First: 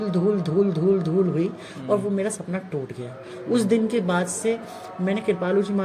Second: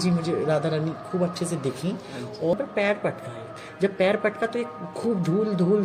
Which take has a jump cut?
second; 1 cut; at 2.5 s

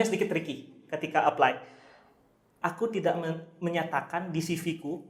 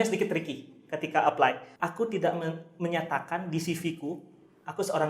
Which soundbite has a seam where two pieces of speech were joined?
second; 1 cut; at 1.7 s

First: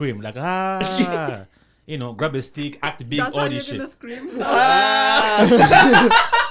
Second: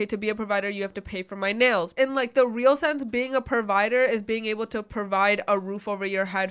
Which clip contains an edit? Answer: second; 1 cut; at 1.9 s

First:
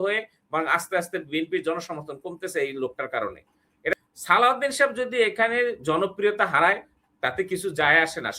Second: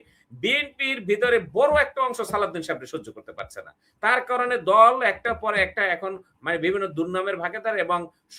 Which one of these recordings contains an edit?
first; 1 cut; at 3.9 s

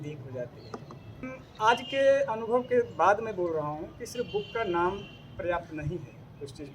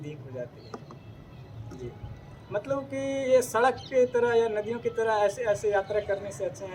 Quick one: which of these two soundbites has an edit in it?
first; 1 cut; at 1.4 s

